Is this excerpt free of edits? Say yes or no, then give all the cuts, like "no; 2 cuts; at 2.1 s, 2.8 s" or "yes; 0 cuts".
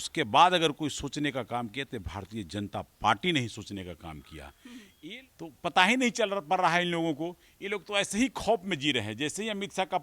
no; 1 cut; at 5.1 s